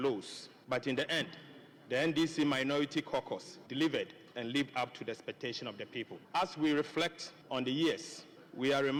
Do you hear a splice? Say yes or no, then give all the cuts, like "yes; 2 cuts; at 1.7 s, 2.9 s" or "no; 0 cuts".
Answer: no; 0 cuts